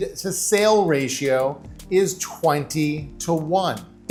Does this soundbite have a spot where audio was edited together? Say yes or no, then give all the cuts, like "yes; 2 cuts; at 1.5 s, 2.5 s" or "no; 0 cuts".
no; 0 cuts